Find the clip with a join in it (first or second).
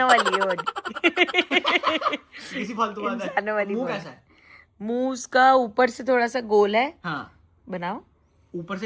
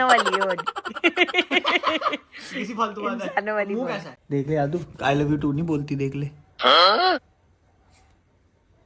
second